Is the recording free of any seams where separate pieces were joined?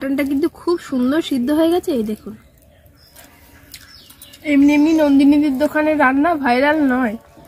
no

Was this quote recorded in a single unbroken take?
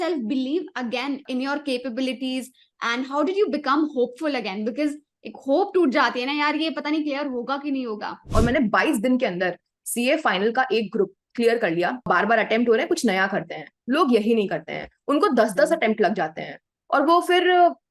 no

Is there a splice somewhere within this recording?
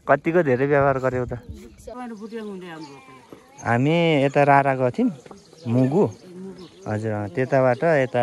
yes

